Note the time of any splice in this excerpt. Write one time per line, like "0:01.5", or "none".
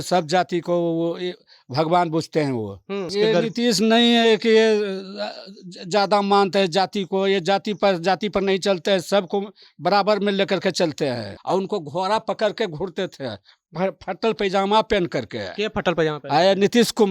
0:03.1
0:11.3